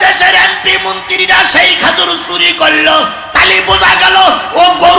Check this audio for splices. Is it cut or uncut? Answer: uncut